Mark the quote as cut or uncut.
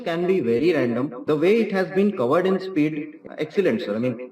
cut